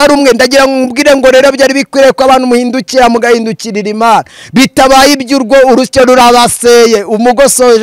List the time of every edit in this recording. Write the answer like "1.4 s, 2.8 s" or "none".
none